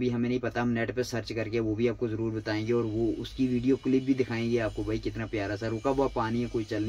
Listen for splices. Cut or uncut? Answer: uncut